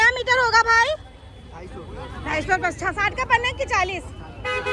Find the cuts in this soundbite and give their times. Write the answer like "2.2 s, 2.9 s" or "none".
none